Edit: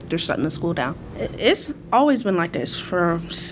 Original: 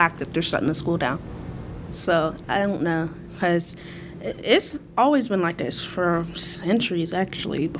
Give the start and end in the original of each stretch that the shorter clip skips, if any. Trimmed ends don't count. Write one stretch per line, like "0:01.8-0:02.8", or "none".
0:01.3-0:04.1